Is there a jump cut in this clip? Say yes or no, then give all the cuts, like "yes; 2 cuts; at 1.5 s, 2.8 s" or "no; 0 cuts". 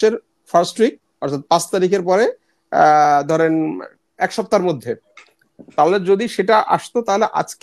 no; 0 cuts